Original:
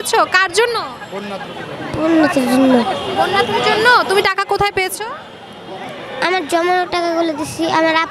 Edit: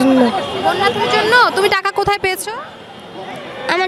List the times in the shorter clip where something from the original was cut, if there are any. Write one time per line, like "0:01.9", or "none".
none